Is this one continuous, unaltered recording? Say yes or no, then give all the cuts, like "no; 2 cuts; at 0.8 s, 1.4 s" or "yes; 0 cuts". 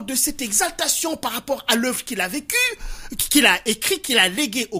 yes; 0 cuts